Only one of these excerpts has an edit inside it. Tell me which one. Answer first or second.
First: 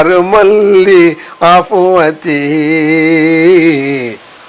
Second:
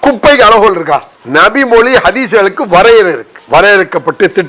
second